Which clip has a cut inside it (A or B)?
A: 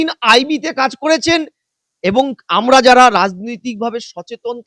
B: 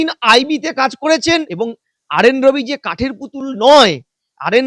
B